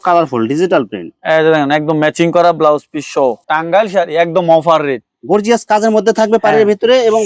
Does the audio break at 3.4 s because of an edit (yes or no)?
yes